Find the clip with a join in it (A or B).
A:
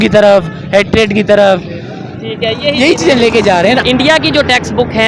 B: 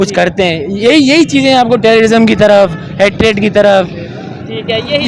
A